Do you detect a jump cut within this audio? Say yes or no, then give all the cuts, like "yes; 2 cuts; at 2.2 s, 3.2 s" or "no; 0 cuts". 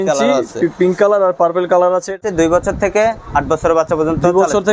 yes; 1 cut; at 2.2 s